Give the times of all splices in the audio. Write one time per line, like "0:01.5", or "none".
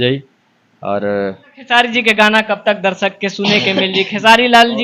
0:01.5